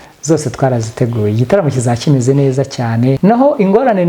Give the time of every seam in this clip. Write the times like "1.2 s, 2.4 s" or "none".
3.2 s